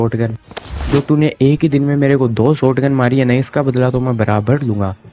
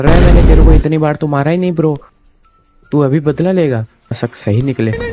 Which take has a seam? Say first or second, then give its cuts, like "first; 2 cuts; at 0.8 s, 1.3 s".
second; 1 cut; at 4.1 s